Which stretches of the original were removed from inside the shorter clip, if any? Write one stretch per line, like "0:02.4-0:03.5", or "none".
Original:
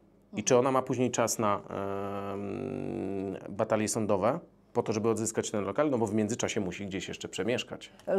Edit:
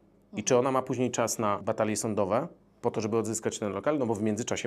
0:01.6-0:03.5